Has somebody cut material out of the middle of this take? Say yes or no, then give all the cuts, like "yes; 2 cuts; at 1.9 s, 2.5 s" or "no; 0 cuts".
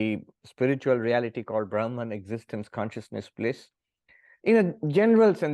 no; 0 cuts